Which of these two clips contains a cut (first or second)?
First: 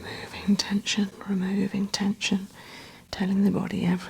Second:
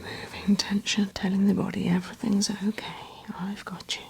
second